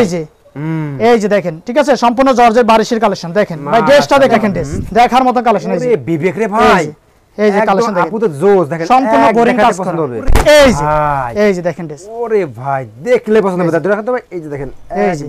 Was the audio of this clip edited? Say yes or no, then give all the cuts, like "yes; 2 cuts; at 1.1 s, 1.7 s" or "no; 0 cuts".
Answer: yes; 2 cuts; at 4.4 s, 10.1 s